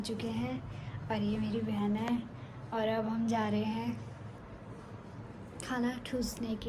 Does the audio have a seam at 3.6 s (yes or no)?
no